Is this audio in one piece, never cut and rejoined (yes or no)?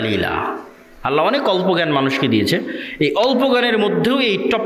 yes